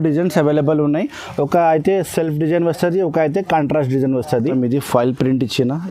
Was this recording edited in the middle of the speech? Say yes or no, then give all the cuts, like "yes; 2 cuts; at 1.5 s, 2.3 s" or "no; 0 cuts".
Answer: yes; 1 cut; at 4.5 s